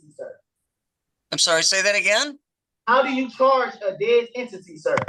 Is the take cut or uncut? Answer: uncut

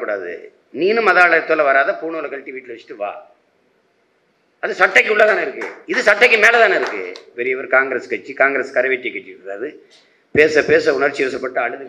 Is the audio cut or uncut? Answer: cut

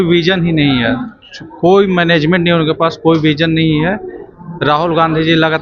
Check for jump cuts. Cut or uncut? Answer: uncut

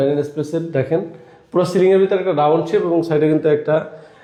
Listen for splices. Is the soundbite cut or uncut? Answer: uncut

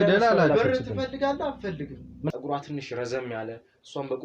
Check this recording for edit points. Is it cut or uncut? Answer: cut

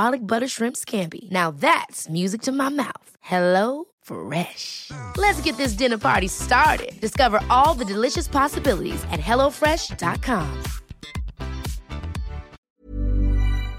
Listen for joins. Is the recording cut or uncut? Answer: cut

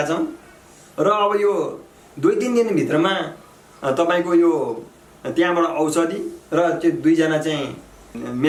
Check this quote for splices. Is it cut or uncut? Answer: uncut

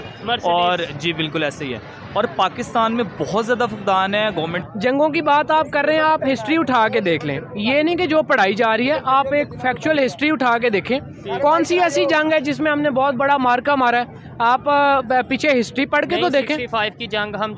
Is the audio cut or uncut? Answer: cut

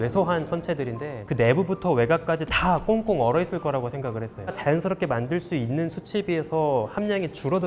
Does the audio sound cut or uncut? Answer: cut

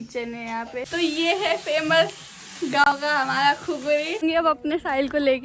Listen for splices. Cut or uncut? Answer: cut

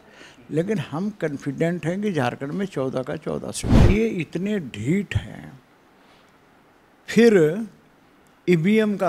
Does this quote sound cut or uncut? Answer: cut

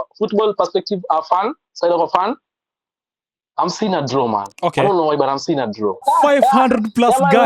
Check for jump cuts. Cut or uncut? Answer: cut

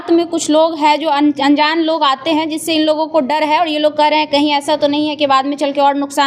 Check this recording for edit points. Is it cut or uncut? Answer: uncut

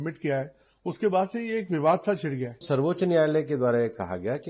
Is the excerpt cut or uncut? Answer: cut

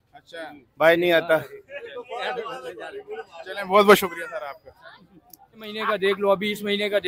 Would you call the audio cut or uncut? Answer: cut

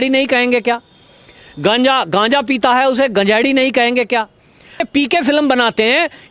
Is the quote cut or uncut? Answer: cut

